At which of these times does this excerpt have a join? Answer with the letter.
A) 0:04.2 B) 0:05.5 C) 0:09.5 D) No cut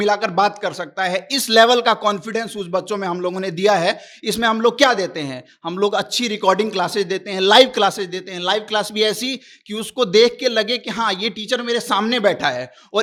D